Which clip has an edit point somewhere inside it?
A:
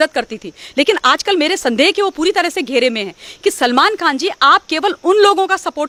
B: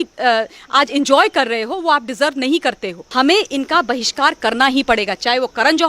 B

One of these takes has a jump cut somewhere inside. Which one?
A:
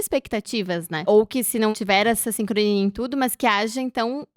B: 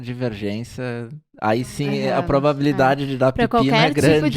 A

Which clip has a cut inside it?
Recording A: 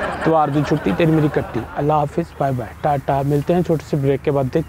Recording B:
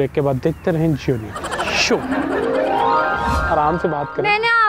B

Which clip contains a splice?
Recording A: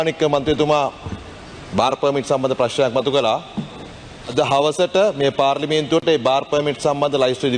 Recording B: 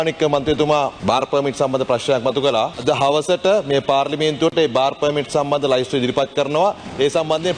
B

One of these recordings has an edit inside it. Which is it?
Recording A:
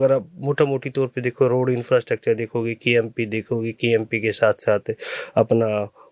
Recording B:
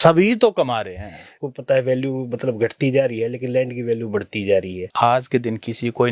B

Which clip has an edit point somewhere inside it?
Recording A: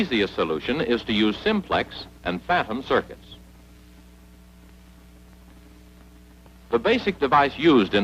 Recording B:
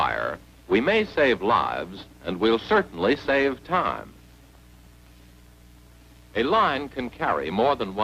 A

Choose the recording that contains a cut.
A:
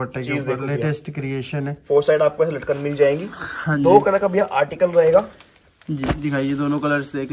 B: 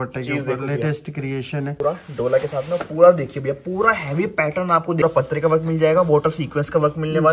B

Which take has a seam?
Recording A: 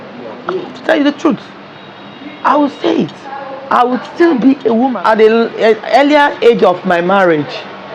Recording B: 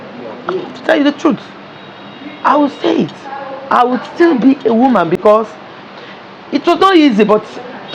A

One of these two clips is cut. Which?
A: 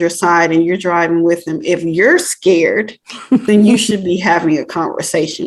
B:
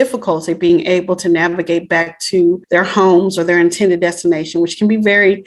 B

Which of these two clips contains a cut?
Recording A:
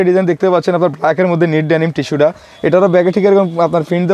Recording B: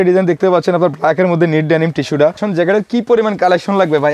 B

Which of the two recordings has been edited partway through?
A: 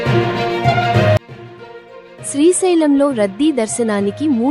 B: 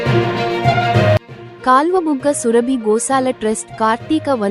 B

